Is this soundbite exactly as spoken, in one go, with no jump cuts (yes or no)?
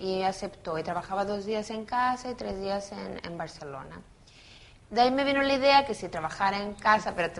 yes